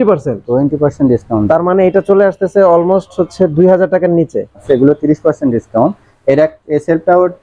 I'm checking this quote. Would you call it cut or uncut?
cut